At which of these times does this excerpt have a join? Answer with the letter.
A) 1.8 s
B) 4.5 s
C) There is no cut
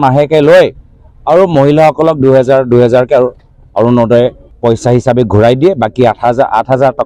B